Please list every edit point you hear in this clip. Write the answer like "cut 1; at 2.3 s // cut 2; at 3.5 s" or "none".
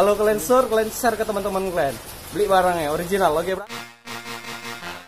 cut 1; at 3.5 s